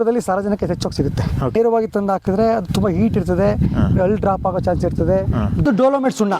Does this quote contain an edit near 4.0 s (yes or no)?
no